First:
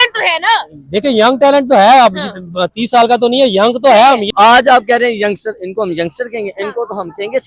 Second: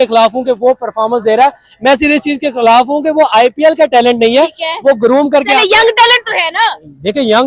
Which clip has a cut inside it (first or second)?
first